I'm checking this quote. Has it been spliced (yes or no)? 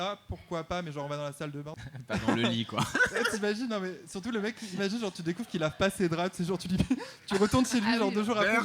yes